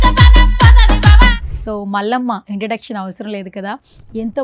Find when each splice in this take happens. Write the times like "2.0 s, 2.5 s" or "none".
none